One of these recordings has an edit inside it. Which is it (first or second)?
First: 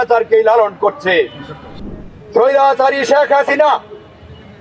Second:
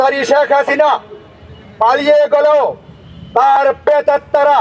first